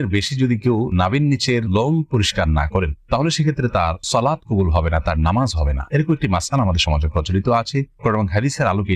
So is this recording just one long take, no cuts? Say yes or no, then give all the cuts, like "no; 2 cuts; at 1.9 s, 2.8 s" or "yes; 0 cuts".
yes; 0 cuts